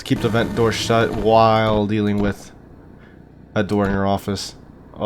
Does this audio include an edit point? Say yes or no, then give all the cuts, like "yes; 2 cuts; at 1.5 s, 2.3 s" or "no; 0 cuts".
no; 0 cuts